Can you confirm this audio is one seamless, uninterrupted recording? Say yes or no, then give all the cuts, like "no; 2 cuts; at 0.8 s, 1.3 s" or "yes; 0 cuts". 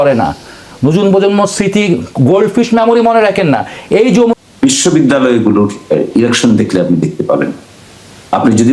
no; 1 cut; at 4.3 s